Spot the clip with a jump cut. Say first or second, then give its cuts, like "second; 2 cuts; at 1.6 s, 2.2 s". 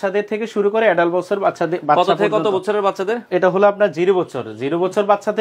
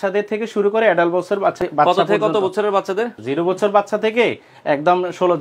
second; 2 cuts; at 1.6 s, 3.1 s